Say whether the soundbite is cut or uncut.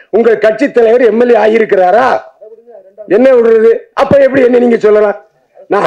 uncut